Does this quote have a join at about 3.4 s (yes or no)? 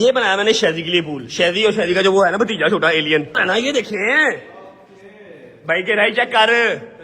yes